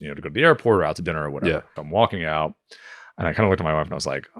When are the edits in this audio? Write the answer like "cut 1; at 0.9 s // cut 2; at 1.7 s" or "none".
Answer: cut 1; at 1.8 s